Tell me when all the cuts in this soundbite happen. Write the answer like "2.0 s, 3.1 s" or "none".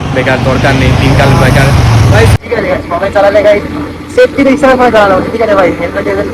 2.3 s